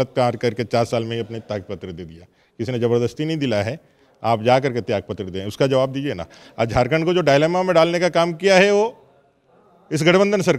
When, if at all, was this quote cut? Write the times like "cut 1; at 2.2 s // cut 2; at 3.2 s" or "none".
none